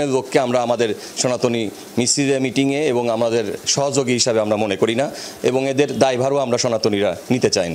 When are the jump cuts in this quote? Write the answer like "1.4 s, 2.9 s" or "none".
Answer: none